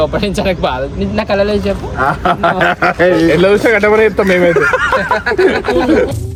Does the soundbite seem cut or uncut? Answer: uncut